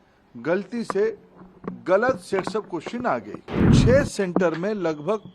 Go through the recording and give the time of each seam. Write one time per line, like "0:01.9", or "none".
0:03.7